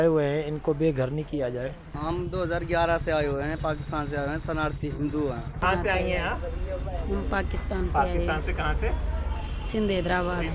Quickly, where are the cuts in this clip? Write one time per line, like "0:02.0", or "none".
0:01.9
0:05.5